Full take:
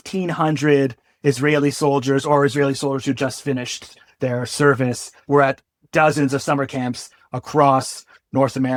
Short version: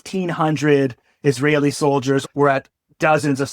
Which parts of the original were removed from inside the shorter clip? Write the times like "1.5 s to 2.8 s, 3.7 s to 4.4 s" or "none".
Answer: 2.2 s to 5.2 s